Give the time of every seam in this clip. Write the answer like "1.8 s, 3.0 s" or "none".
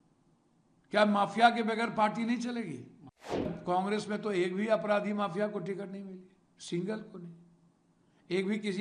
3.5 s